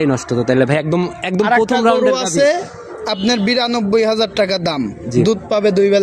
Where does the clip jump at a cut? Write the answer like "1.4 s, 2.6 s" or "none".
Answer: none